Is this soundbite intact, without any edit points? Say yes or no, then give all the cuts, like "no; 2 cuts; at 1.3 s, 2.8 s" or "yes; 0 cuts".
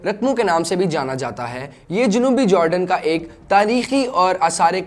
yes; 0 cuts